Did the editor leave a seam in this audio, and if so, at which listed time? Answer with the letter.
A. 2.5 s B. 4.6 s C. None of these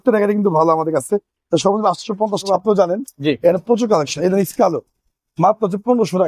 A